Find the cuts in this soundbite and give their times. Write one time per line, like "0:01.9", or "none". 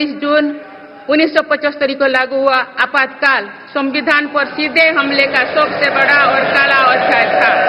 none